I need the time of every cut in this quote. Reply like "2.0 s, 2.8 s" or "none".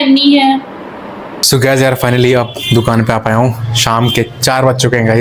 1.3 s